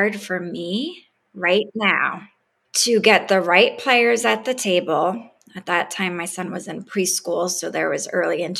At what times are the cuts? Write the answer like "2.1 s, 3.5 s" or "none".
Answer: 2.2 s